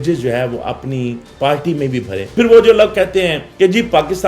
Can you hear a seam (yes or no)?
yes